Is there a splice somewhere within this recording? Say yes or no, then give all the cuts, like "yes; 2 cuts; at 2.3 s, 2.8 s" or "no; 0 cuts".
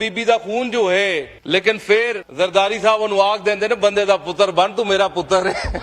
yes; 2 cuts; at 1.3 s, 2.3 s